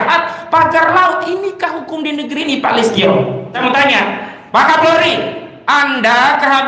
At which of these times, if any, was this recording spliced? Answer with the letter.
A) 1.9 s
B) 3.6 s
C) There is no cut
B